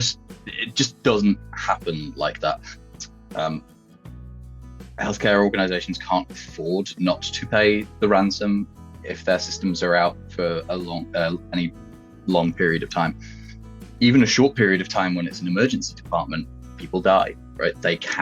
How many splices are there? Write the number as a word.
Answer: one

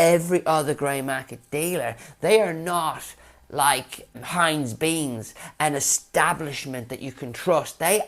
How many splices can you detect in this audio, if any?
one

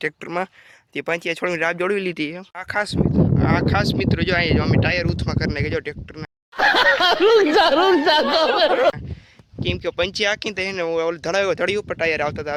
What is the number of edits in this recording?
zero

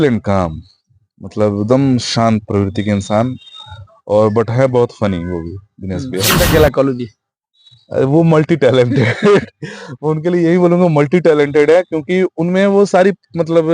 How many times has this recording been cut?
one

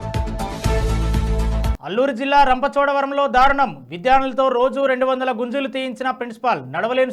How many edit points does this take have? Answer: one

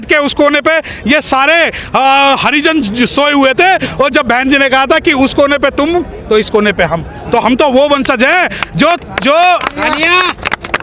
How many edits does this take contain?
zero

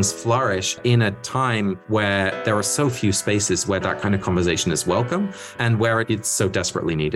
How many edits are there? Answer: one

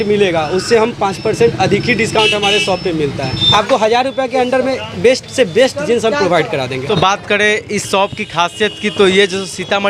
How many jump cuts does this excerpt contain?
two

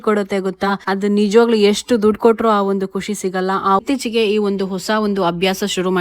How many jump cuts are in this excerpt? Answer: one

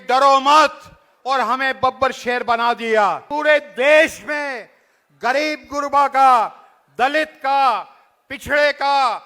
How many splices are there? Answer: one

